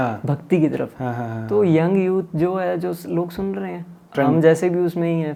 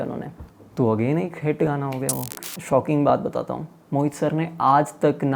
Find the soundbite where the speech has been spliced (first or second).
second